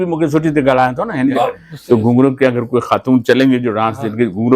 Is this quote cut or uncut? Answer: cut